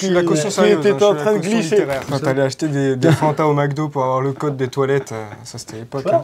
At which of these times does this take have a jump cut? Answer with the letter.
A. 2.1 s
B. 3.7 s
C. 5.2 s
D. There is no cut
A